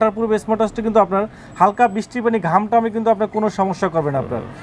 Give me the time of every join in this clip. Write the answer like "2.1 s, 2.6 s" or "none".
none